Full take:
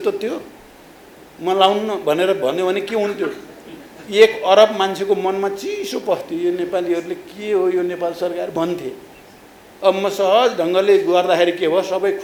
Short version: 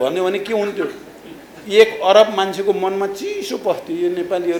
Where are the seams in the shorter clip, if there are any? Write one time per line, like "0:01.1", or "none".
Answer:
none